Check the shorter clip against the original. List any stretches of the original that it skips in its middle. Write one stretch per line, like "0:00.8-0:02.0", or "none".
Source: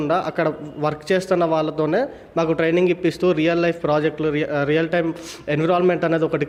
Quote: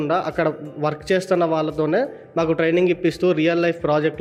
none